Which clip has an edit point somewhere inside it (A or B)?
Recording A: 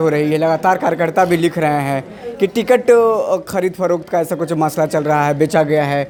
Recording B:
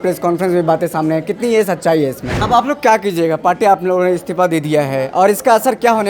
B